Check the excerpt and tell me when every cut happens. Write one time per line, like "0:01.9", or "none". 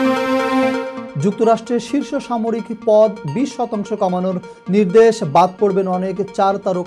0:00.9